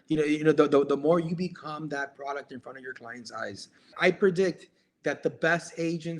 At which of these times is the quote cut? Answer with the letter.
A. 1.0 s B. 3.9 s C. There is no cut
B